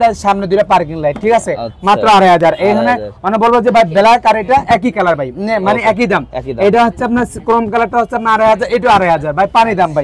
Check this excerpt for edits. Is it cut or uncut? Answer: uncut